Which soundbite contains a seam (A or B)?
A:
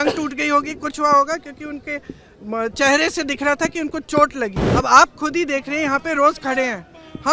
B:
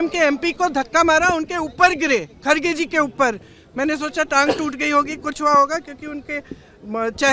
A